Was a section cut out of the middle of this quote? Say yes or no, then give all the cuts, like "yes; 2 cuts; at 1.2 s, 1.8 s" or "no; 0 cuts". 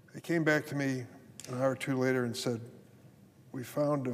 yes; 1 cut; at 1.9 s